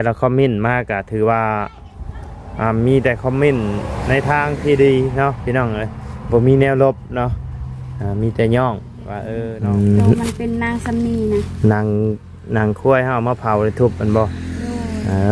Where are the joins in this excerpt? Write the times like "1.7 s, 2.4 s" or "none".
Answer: 9.2 s